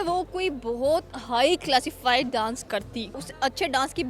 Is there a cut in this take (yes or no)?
yes